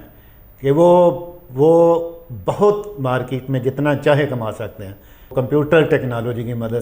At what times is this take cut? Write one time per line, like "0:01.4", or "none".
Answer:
0:05.3